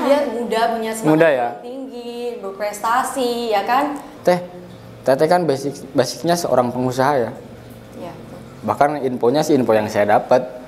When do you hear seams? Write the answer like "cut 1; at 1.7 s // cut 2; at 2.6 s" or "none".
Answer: cut 1; at 4.1 s